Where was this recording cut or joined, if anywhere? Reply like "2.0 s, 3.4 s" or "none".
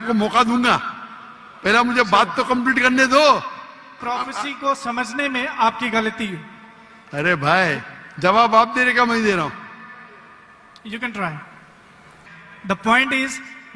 4.0 s, 12.1 s